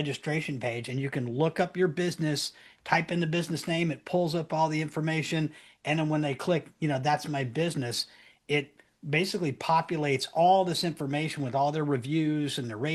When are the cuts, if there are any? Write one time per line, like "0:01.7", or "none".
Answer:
none